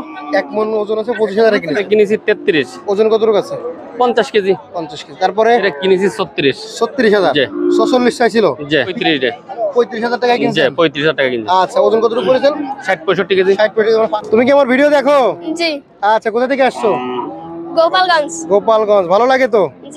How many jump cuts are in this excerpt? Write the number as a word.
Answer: four